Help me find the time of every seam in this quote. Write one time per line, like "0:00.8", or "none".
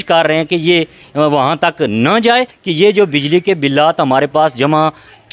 0:02.5